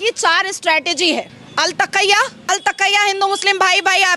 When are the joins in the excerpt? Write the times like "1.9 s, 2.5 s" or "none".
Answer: 1.4 s, 2.4 s